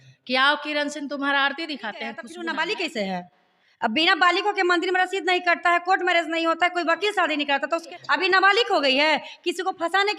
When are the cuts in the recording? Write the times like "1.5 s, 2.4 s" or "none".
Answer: 2.3 s, 7.9 s